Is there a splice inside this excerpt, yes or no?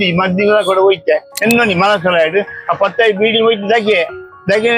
yes